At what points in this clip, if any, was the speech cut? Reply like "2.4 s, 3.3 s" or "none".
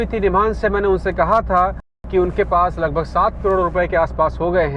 2.0 s